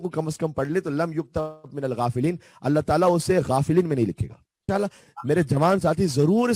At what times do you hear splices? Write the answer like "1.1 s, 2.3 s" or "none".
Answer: 4.7 s